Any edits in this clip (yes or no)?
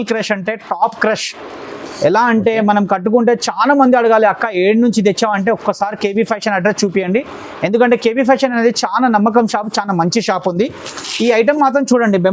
no